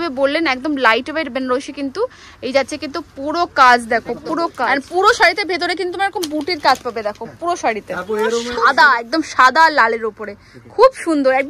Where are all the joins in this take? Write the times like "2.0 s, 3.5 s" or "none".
4.6 s, 8.5 s